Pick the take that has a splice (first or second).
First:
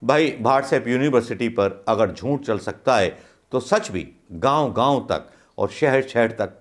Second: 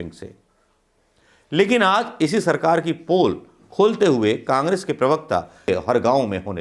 second